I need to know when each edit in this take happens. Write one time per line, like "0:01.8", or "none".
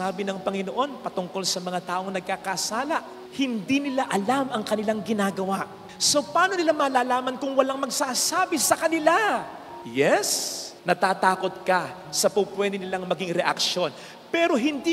none